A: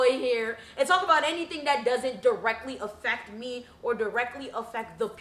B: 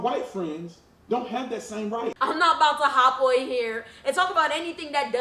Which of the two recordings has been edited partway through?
B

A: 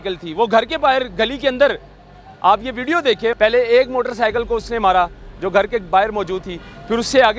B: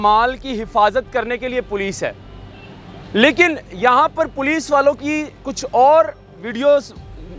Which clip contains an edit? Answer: A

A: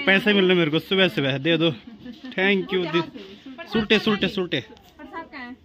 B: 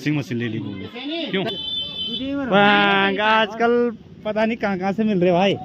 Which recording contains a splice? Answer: B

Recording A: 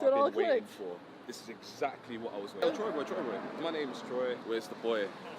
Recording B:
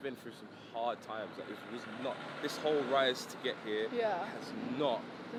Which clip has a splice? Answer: A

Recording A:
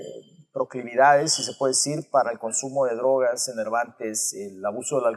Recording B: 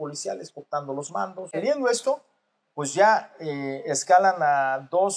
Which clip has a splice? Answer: B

